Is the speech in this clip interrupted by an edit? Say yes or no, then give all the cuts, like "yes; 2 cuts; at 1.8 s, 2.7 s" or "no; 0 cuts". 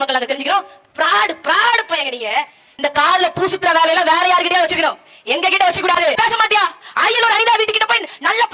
yes; 2 cuts; at 2.6 s, 6.2 s